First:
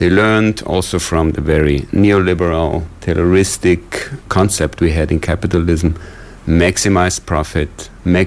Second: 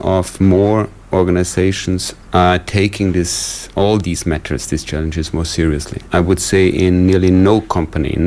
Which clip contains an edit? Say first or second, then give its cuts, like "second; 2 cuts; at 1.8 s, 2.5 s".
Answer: second; 2 cuts; at 2.1 s, 5.9 s